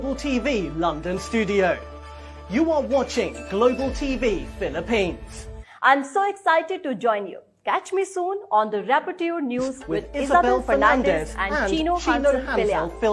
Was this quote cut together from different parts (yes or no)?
no